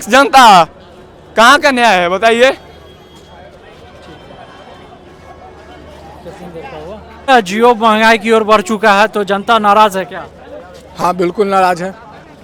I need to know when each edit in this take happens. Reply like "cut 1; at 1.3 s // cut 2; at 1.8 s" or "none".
none